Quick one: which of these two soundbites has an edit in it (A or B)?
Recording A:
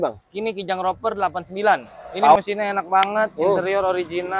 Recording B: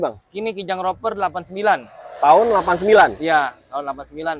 A